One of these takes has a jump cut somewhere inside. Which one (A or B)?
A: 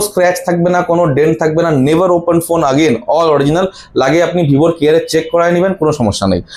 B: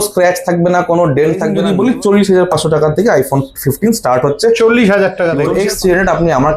B